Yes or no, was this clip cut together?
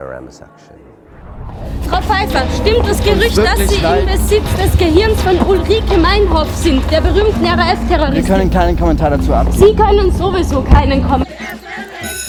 no